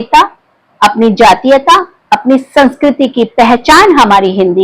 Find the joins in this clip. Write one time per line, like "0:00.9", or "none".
none